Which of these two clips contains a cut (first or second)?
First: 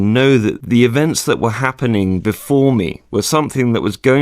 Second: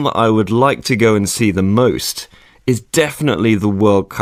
first